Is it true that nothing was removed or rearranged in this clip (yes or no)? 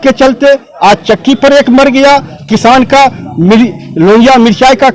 yes